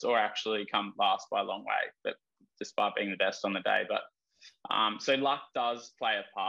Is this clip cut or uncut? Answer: uncut